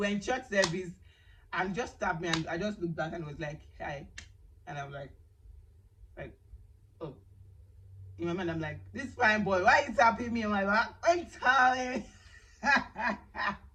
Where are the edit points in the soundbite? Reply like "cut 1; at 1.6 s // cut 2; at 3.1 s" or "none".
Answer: none